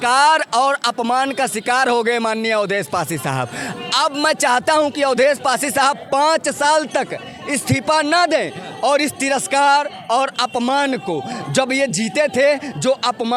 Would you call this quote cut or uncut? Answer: uncut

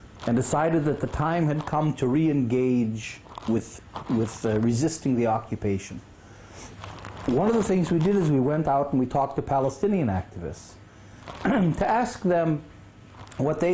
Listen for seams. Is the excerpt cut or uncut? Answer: uncut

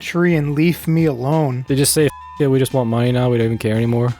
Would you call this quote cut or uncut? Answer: cut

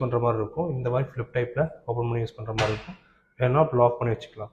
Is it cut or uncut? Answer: uncut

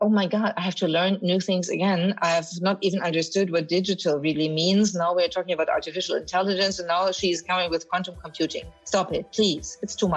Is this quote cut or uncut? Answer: uncut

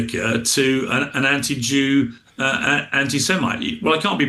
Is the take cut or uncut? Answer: uncut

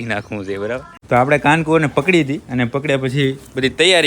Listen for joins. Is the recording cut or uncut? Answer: cut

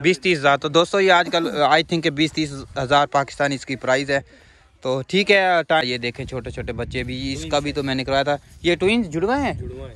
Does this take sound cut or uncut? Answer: cut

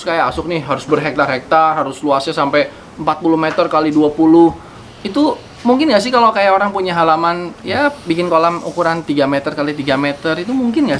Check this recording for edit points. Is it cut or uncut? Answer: uncut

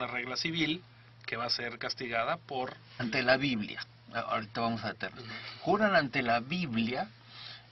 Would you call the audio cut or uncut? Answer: uncut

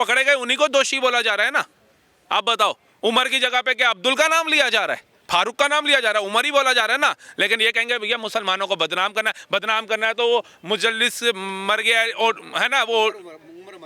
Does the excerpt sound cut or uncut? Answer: uncut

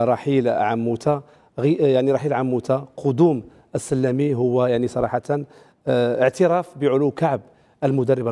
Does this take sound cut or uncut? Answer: uncut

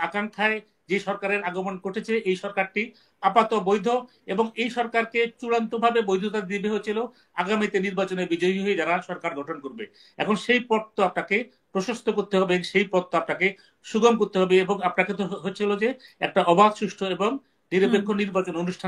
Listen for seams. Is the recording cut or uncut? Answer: uncut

